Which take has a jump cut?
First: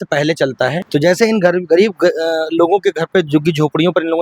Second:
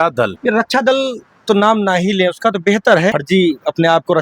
second; 1 cut; at 3.1 s

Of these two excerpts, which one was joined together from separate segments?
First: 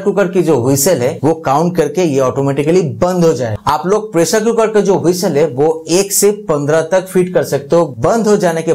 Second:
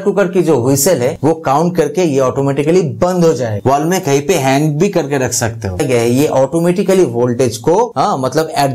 second; 2 cuts; at 3.5 s, 5.8 s

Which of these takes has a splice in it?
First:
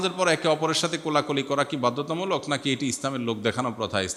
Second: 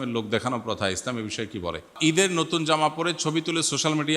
second; 1 cut; at 2.0 s

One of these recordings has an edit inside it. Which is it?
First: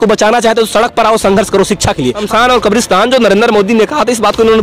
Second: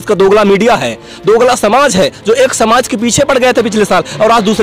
first; 1 cut; at 2.2 s

